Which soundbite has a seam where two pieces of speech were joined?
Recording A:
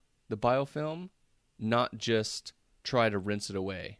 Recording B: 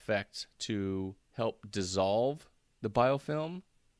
B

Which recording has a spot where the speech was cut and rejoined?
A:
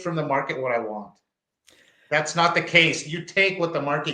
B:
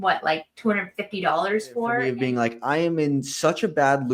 B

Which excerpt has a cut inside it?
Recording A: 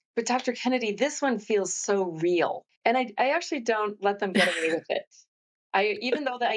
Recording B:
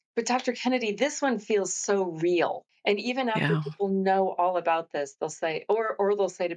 A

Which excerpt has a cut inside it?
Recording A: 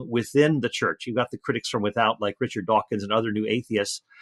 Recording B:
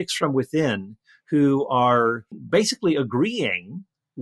B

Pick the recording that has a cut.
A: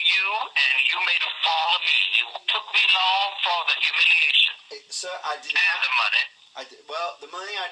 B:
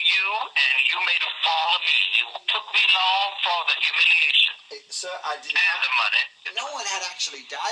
A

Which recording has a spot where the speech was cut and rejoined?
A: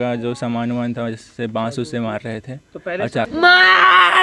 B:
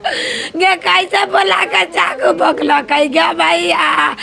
A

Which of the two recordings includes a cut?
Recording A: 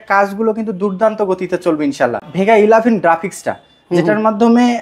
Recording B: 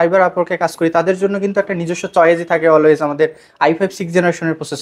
A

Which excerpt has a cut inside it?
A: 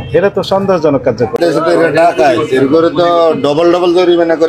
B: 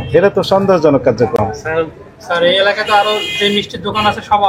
A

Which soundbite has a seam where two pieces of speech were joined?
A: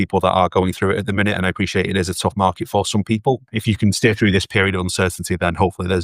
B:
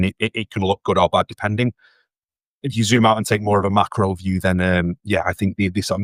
A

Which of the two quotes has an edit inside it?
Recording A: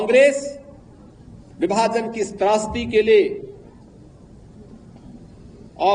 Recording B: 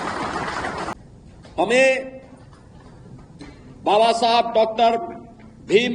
B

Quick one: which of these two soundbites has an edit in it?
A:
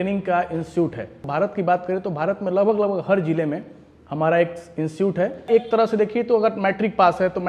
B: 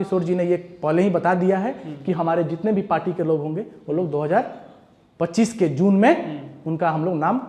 A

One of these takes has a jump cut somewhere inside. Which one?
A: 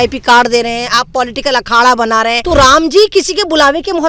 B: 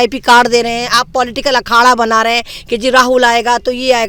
A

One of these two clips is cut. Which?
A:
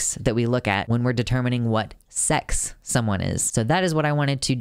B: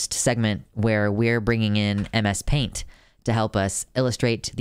A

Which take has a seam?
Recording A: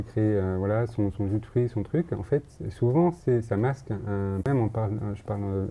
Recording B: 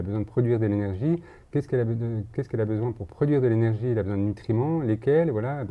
A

